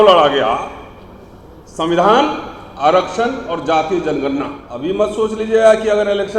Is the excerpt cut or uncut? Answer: cut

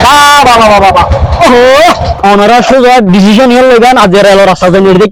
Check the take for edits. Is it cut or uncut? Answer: cut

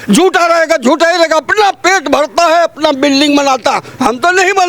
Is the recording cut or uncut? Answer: uncut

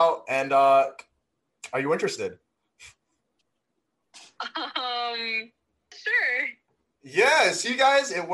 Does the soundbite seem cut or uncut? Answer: cut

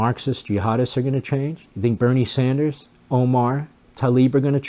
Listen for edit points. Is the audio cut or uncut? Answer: cut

